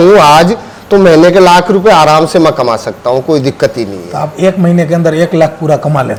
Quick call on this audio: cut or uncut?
uncut